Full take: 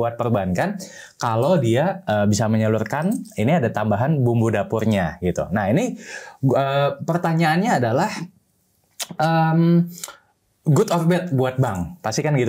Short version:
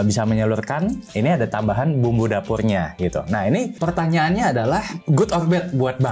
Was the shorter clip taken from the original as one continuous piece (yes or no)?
no